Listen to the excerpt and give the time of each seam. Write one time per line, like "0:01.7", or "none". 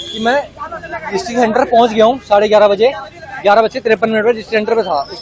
none